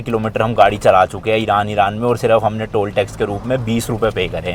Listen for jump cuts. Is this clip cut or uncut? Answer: uncut